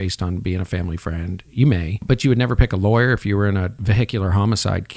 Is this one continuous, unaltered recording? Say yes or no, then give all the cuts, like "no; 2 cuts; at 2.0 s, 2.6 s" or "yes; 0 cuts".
no; 2 cuts; at 2.0 s, 3.8 s